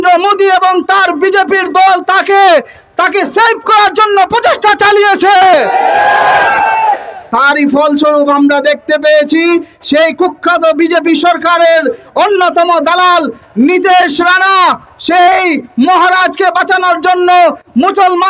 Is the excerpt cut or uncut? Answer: uncut